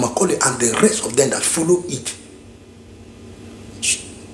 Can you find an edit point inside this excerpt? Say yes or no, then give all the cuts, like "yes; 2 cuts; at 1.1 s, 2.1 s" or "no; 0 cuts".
no; 0 cuts